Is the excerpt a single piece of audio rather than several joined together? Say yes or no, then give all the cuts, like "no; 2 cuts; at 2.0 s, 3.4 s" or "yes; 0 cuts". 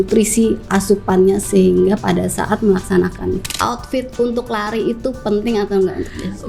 no; 1 cut; at 3.5 s